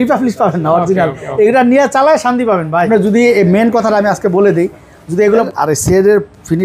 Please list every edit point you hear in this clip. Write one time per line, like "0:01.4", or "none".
0:02.9
0:05.4